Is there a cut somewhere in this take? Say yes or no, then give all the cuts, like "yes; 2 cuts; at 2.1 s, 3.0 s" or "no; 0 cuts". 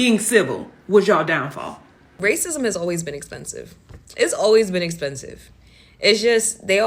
yes; 1 cut; at 2.1 s